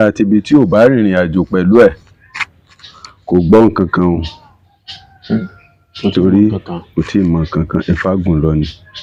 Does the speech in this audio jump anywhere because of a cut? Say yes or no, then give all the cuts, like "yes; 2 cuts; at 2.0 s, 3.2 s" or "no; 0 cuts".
no; 0 cuts